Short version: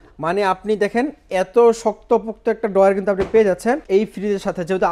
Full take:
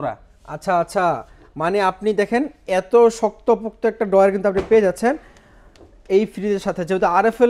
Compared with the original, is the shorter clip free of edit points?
no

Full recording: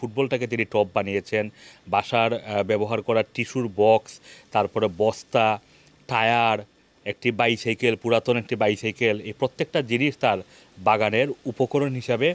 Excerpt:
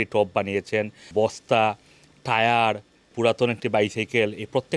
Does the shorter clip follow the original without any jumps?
no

